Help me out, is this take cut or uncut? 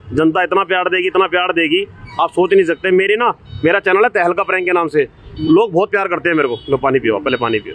uncut